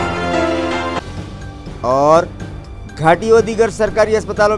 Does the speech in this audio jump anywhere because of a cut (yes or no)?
yes